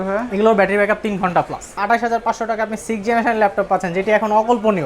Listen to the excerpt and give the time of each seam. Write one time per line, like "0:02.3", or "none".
0:01.8